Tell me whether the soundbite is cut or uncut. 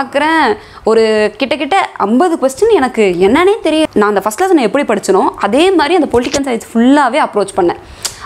cut